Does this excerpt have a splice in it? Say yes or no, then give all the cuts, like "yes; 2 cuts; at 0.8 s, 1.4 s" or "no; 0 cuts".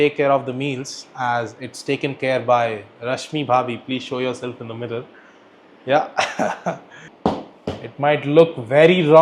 yes; 1 cut; at 7.0 s